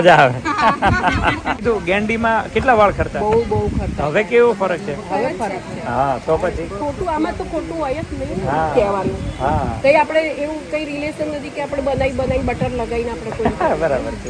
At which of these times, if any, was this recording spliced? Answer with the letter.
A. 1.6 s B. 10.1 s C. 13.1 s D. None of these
A